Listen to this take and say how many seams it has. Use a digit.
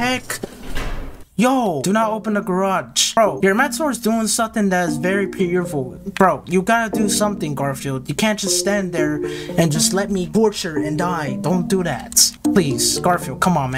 0